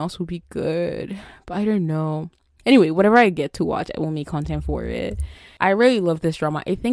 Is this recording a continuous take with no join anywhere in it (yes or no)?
no